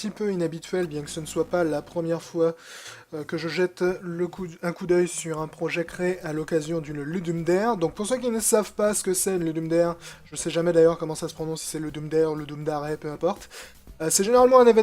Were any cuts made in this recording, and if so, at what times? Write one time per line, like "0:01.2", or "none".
0:13.3